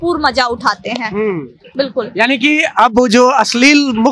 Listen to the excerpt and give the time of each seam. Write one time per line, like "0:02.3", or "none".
none